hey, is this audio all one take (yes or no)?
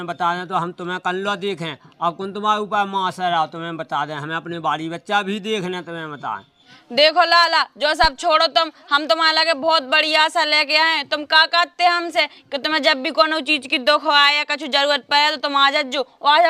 yes